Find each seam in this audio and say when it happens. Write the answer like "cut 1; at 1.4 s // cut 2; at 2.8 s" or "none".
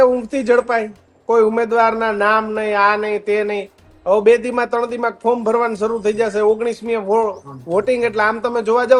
none

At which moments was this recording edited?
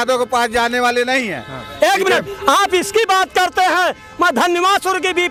none

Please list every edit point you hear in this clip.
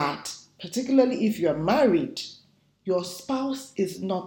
none

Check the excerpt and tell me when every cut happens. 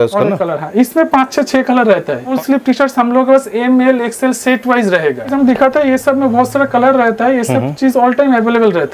cut 1; at 2.3 s // cut 2; at 5.3 s

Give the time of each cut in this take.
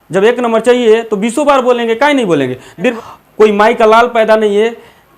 cut 1; at 2.9 s

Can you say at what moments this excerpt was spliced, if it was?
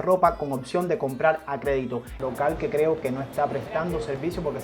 cut 1; at 2.1 s

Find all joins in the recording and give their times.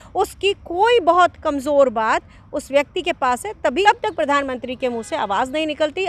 cut 1; at 3.8 s

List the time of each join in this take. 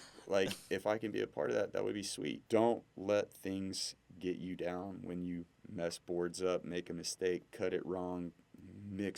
cut 1; at 2.4 s

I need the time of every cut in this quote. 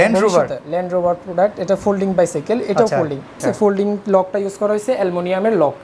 cut 1; at 3.4 s

